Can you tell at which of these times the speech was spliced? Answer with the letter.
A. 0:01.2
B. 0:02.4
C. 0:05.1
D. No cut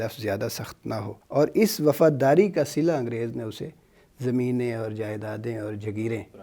A